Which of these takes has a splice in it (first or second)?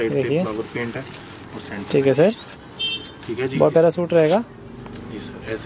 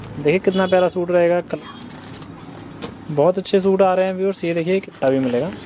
second